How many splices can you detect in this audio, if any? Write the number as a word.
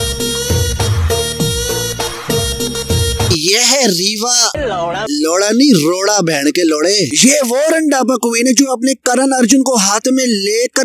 one